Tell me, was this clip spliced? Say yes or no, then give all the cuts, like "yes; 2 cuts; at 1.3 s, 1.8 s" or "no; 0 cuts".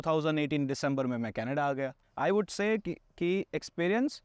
yes; 1 cut; at 2.0 s